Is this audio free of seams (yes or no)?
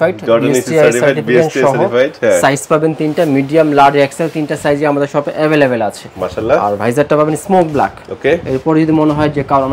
yes